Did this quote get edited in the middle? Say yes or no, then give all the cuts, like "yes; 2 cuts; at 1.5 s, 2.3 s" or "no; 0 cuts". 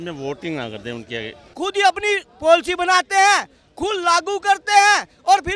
yes; 1 cut; at 1.5 s